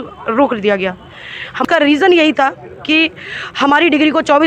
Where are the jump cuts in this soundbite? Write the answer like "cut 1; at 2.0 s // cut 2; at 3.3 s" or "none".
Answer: cut 1; at 1.6 s